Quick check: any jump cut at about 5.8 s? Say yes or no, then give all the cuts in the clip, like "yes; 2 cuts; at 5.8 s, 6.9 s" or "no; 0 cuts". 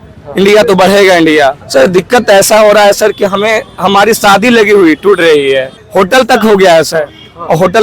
yes; 2 cuts; at 1.6 s, 5.8 s